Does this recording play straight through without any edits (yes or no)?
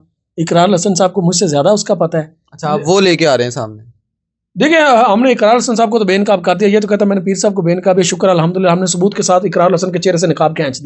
yes